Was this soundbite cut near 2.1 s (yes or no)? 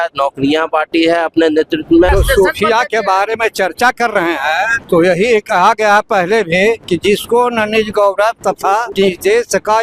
yes